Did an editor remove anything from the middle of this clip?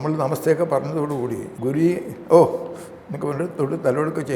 yes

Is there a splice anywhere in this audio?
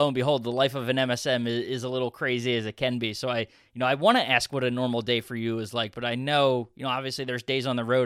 no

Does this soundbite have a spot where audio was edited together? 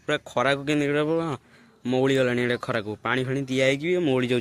no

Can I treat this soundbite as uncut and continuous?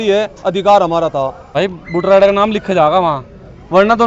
no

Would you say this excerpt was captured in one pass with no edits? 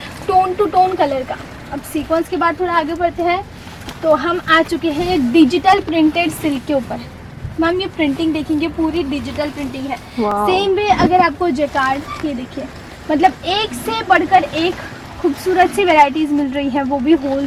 yes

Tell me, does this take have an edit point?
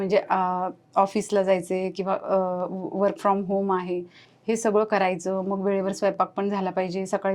no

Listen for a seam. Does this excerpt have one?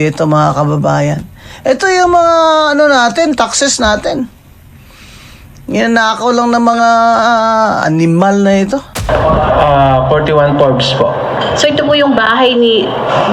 yes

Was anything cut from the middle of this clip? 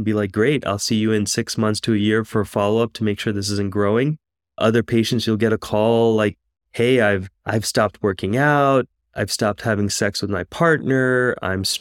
no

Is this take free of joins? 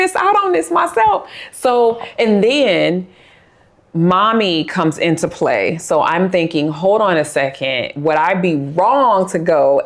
yes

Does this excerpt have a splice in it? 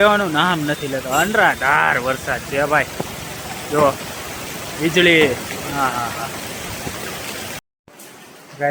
no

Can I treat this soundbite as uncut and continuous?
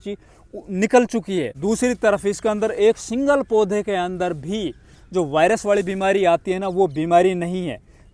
yes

